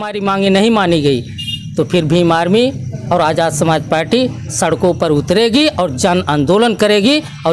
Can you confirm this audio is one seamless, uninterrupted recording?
yes; 0 cuts

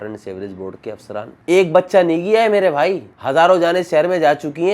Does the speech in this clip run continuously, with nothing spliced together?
no; 1 cut; at 1.4 s

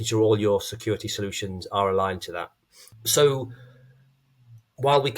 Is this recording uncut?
no; 1 cut; at 2.9 s

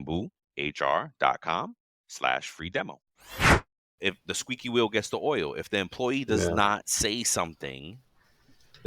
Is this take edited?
yes; 1 cut; at 4.0 s

